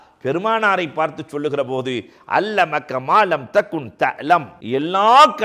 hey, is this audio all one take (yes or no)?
no